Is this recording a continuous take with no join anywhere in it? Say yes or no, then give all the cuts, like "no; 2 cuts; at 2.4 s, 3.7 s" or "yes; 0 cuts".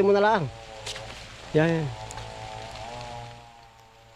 yes; 0 cuts